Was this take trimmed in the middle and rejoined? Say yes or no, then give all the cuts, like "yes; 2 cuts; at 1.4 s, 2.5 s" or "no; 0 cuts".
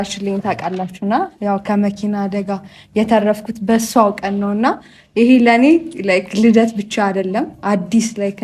no; 0 cuts